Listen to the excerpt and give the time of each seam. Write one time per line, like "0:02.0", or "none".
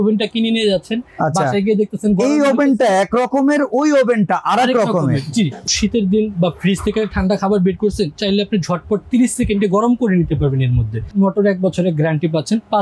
0:05.7
0:11.1